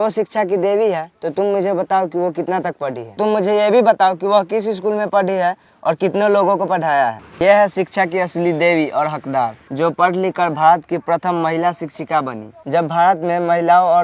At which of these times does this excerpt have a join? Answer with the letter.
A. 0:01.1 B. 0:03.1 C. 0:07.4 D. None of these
C